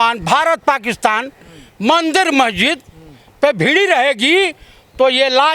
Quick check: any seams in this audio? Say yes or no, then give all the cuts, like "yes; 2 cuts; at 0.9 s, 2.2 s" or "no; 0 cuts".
no; 0 cuts